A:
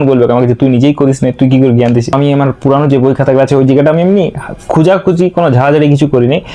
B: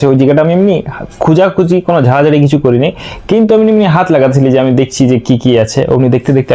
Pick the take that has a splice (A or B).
A